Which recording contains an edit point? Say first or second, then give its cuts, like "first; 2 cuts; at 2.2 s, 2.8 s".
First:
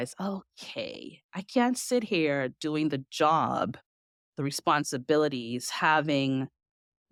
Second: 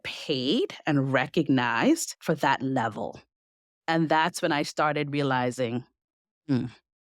second; 1 cut; at 2.1 s